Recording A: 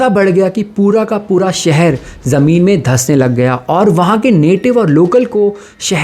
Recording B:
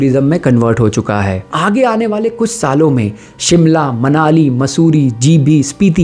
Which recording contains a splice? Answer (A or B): B